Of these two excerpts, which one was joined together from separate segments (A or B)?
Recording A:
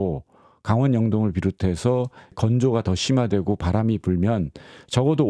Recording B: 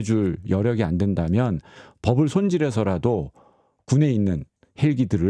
A